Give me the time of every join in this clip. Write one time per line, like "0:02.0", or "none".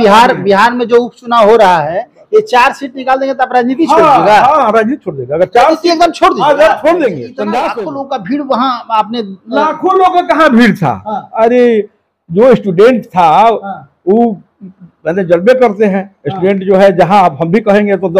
0:07.7